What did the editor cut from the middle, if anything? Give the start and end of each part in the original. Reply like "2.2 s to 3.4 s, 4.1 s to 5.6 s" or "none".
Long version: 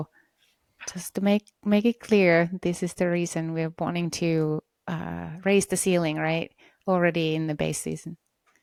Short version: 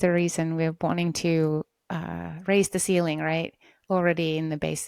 none